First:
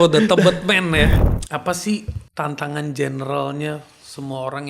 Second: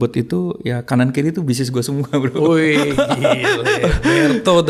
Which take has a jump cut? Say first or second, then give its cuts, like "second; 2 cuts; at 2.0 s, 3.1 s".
first; 2 cuts; at 1.2 s, 2.2 s